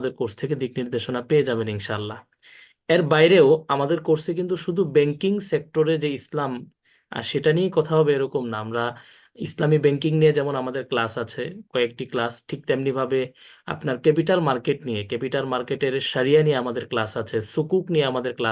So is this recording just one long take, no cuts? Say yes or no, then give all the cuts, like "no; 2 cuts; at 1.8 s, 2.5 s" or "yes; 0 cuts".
yes; 0 cuts